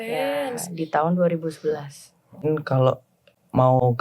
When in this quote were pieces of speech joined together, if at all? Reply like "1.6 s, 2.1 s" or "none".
2.5 s